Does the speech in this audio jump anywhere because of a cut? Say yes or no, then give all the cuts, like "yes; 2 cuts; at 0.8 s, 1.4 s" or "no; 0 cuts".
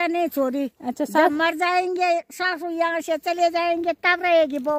no; 0 cuts